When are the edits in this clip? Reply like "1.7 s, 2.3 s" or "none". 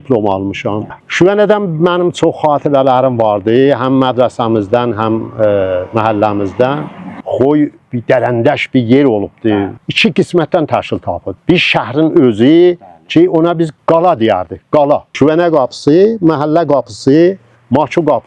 0.9 s, 7.2 s, 9.7 s, 15.1 s